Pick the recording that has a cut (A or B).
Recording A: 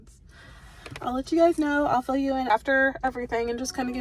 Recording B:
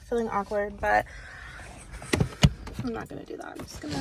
A